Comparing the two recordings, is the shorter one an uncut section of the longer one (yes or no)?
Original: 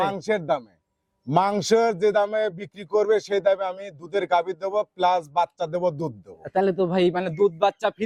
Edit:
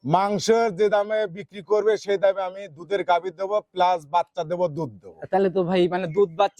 yes